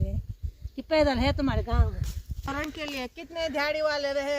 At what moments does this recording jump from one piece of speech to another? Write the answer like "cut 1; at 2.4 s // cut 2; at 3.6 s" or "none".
cut 1; at 2.5 s